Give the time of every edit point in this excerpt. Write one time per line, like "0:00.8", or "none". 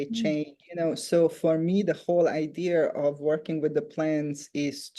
none